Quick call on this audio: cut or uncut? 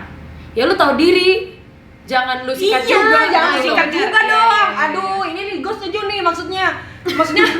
uncut